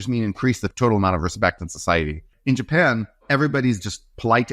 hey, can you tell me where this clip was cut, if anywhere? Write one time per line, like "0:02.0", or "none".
0:02.3
0:03.2